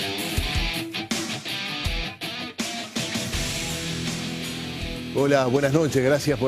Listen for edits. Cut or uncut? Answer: cut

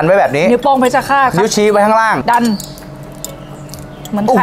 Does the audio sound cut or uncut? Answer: cut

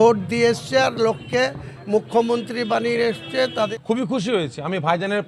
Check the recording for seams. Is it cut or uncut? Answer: cut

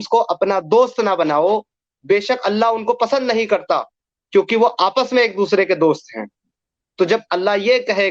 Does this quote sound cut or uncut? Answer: uncut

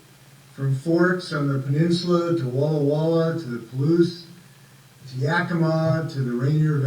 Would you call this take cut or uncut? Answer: cut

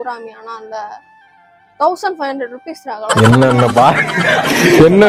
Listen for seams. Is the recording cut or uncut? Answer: uncut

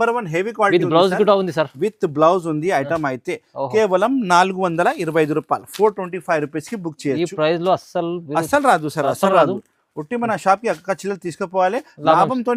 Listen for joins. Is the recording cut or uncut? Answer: uncut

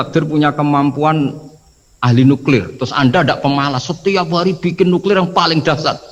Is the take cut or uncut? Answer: uncut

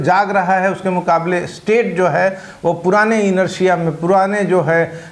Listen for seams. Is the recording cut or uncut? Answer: uncut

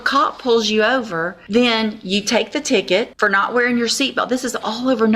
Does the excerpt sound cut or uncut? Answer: cut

